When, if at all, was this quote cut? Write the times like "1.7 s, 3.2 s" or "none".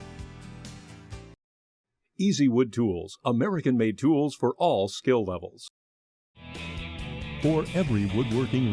1.0 s